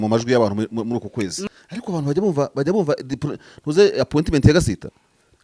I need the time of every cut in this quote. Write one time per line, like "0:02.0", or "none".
0:01.4